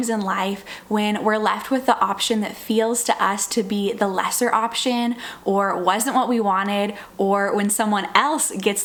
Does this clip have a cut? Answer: no; 0 cuts

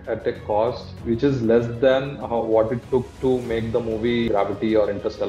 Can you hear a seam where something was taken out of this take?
yes; 2 cuts; at 0.9 s, 4.3 s

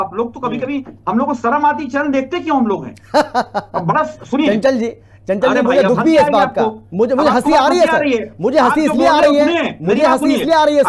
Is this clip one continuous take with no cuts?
yes; 0 cuts

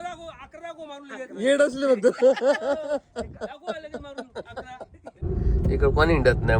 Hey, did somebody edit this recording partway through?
yes; 1 cut; at 5.1 s

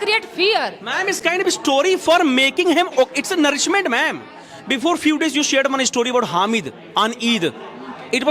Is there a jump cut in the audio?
no; 0 cuts

